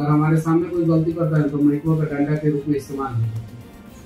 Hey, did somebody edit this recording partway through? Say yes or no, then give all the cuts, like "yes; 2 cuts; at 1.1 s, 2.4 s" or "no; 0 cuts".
no; 0 cuts